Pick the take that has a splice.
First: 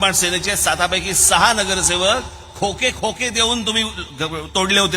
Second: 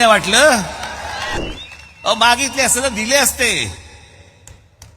second; 1 cut; at 1.4 s

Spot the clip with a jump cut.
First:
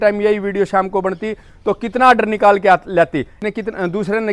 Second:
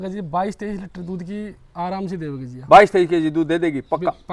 first; 1 cut; at 3.4 s

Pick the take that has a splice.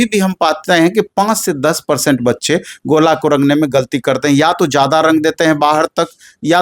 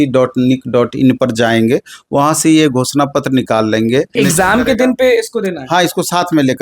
second; 1 cut; at 4.1 s

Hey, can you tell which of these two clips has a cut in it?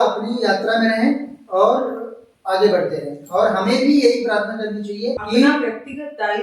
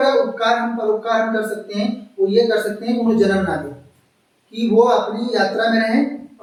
first; 1 cut; at 5.2 s

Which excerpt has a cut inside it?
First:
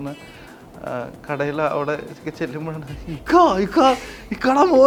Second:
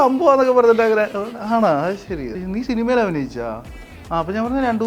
second; 1 cut; at 2.4 s

